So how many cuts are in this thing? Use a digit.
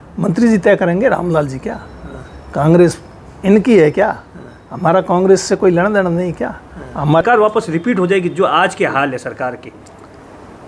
1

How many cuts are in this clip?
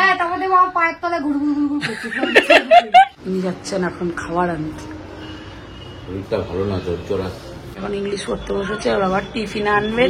2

